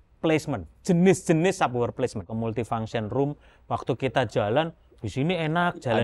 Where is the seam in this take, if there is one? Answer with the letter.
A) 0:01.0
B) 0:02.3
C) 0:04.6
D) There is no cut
B